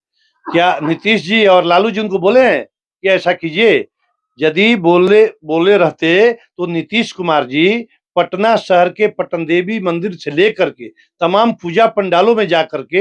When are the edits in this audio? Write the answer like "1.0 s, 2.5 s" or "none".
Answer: none